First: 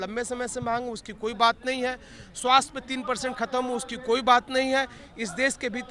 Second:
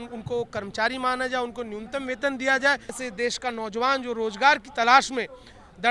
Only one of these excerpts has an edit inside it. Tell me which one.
second; 1 cut; at 3.0 s

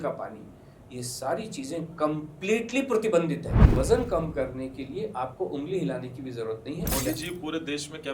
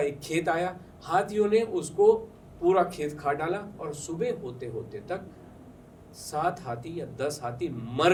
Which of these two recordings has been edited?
first; 2 cuts; at 3.7 s, 6.9 s

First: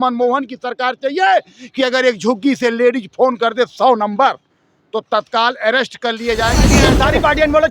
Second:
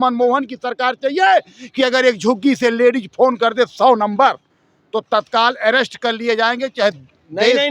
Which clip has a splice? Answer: first; 1 cut; at 6.7 s

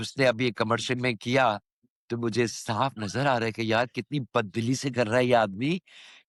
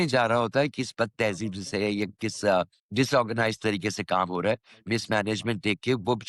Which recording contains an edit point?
second; 1 cut; at 2.8 s

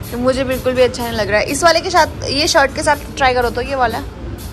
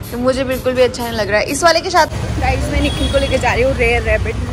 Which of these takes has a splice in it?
second; 1 cut; at 2.2 s

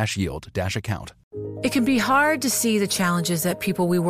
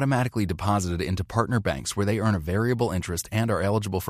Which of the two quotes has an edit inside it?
first; 1 cut; at 1.3 s

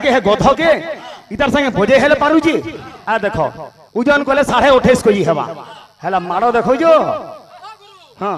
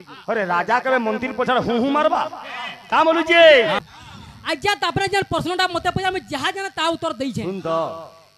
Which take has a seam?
second; 1 cut; at 3.8 s

